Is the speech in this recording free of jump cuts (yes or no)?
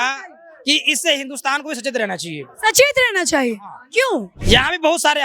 no